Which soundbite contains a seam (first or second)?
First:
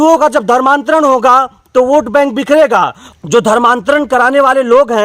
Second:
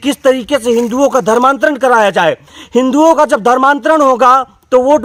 first